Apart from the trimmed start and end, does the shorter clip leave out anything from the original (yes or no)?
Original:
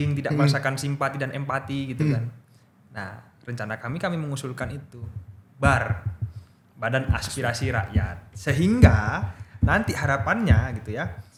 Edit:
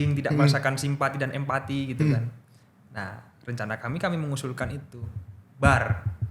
no